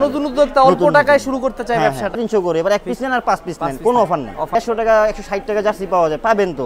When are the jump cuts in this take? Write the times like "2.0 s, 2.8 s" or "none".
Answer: 2.2 s, 4.5 s